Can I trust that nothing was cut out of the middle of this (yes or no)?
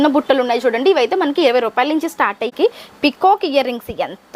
no